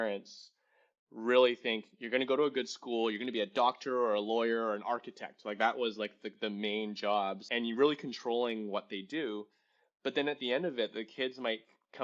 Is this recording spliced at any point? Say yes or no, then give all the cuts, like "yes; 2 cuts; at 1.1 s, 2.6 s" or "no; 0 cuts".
yes; 1 cut; at 7.5 s